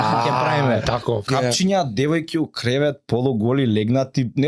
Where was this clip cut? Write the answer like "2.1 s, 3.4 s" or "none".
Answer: 1.3 s